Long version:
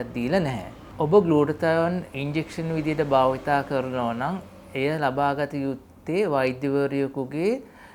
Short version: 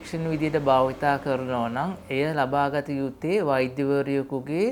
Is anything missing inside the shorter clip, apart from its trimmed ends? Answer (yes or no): yes